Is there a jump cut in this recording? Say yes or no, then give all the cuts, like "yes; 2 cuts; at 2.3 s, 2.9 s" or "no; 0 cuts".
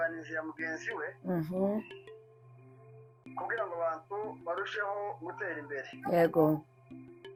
no; 0 cuts